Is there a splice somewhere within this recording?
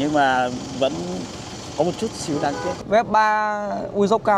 yes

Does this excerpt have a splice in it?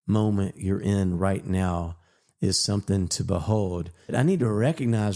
yes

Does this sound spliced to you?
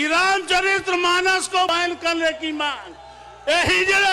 yes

